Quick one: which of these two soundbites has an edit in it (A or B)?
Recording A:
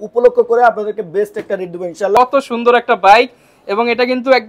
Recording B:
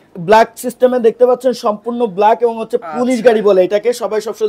A